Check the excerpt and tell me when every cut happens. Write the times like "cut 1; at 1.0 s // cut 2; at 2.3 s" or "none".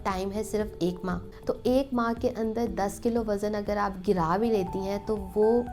cut 1; at 1.3 s